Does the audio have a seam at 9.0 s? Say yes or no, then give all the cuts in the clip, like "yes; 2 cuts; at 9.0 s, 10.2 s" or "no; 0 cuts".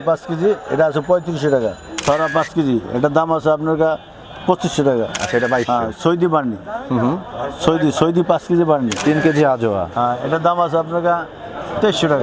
yes; 3 cuts; at 2.0 s, 5.2 s, 9.0 s